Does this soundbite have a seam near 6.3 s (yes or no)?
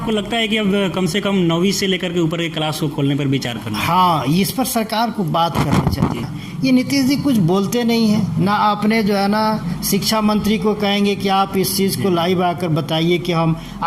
yes